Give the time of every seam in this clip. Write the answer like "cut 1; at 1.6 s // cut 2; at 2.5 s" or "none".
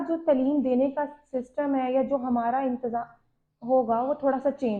none